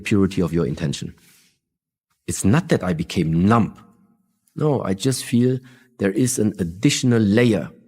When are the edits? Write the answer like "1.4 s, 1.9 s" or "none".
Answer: 2.2 s

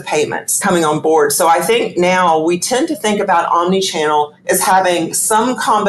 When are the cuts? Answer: none

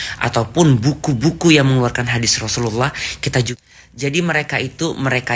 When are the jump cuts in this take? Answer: 3.3 s

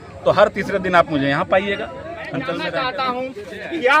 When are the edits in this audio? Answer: 2.6 s

